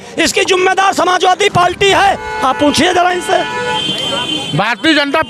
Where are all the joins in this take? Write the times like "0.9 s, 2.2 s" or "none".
none